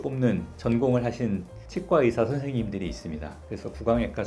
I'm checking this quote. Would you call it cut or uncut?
uncut